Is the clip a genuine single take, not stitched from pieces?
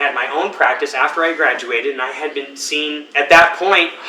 yes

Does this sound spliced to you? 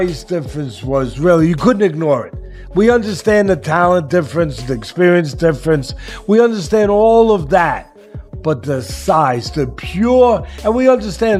no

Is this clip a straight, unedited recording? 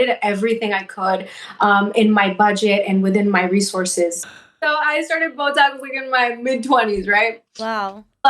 no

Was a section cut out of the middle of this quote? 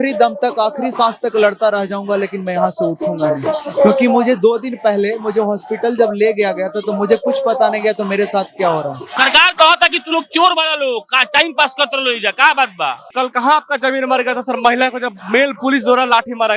yes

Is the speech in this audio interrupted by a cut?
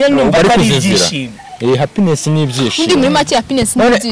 no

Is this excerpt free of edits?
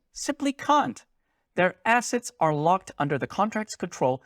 yes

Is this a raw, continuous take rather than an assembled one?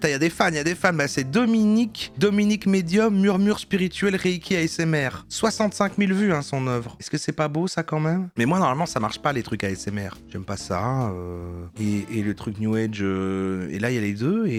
yes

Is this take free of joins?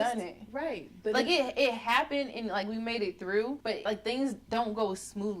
no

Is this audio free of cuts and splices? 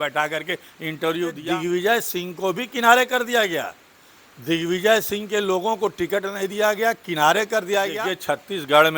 no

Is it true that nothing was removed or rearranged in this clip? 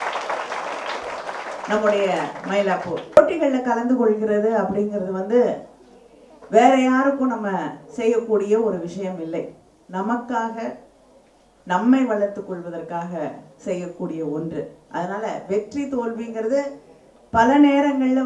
no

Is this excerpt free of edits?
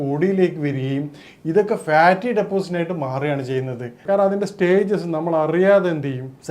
no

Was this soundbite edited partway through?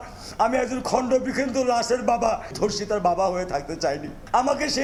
no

